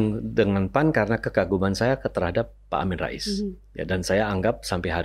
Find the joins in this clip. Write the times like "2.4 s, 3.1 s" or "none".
none